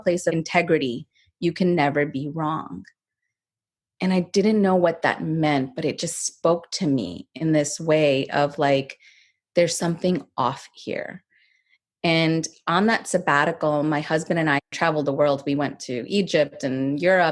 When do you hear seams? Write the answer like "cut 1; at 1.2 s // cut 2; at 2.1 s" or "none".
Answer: cut 1; at 14.7 s

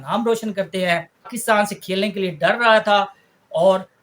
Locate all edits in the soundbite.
cut 1; at 1.4 s

